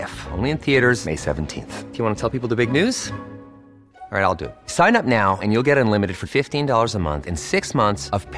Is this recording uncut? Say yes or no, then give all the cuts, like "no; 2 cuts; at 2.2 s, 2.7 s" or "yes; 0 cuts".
yes; 0 cuts